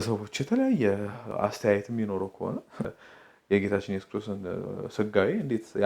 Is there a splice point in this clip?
yes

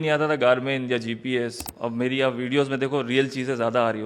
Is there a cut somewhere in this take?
yes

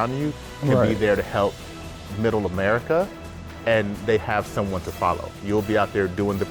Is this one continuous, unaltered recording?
yes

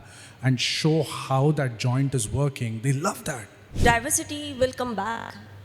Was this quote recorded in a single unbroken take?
no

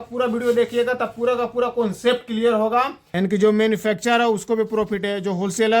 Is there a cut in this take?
yes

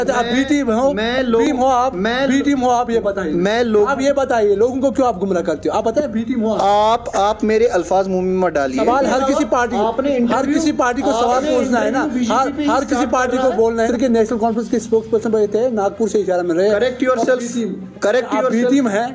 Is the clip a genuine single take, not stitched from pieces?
no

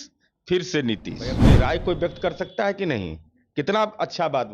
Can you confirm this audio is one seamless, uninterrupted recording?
no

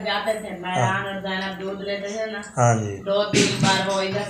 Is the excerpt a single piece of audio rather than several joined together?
yes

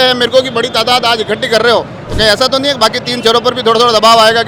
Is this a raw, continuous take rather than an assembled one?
yes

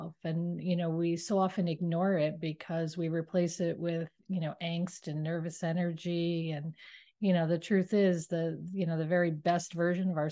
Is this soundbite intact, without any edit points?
yes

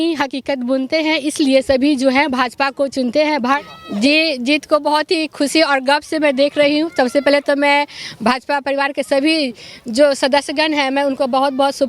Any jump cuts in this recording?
yes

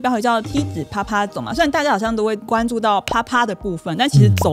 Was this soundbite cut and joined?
no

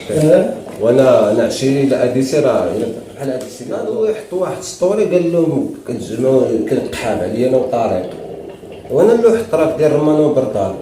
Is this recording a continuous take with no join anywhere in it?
no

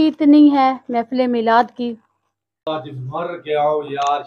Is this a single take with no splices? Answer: no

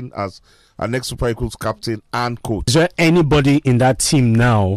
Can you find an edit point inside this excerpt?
yes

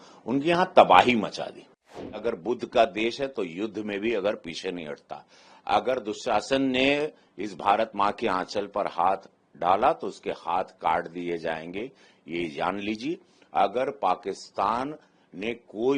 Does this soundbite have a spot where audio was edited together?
yes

